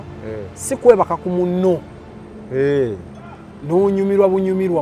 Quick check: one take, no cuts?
yes; 0 cuts

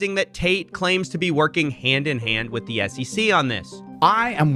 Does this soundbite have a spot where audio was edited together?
no; 0 cuts

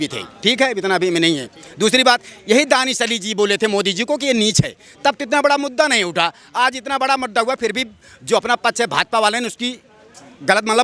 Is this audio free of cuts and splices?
yes; 0 cuts

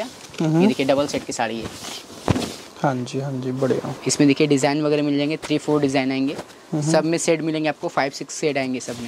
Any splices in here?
no; 0 cuts

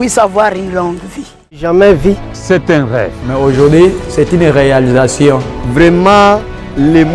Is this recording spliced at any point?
yes; 1 cut; at 1.6 s

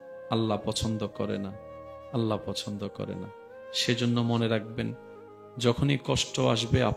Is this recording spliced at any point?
no; 0 cuts

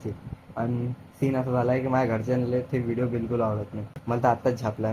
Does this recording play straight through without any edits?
no; 1 cut; at 3.9 s

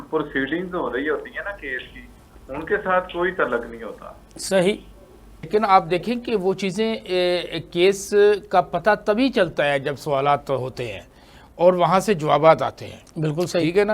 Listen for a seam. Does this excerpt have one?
yes; 1 cut; at 5.5 s

